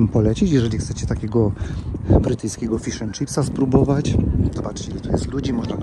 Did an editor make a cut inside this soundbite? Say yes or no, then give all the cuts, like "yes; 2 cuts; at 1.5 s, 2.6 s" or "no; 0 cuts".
no; 0 cuts